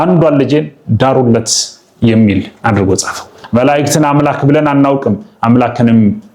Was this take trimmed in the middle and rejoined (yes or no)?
yes